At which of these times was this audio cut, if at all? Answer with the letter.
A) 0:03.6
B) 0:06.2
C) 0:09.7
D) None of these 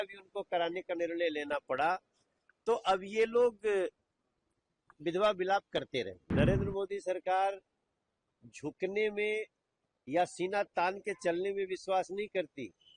B